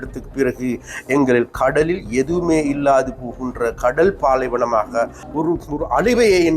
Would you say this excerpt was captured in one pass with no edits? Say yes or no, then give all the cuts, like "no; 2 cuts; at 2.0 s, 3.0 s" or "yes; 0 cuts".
no; 1 cut; at 5.2 s